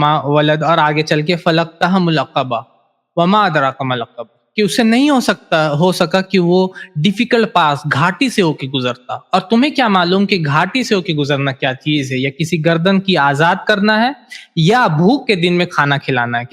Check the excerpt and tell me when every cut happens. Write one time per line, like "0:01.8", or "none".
none